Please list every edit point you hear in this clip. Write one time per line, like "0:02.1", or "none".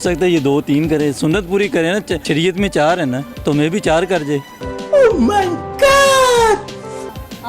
0:02.2
0:03.3

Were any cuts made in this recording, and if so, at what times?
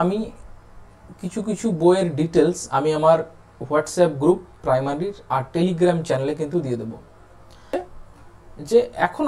0:07.7

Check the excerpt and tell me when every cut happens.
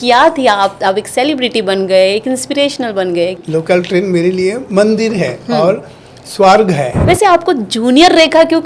0:03.4
0:06.9

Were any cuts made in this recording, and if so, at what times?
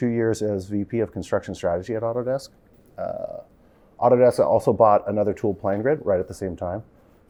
none

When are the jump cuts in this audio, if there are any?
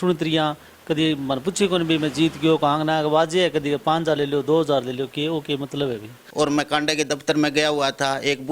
0:06.2

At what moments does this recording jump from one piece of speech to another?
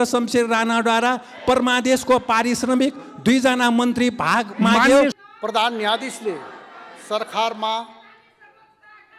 0:05.1

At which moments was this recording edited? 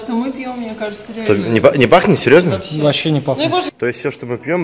0:03.7

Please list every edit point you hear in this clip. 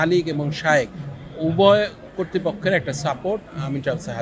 none

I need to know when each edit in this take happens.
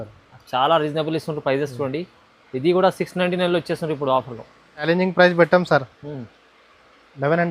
0:04.9

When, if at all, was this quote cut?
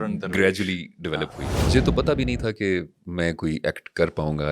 0:01.6

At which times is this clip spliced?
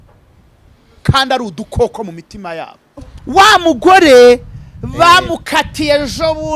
0:03.2

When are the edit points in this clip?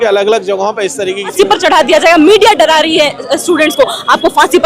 0:01.3

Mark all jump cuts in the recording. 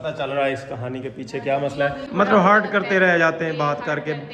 0:02.0

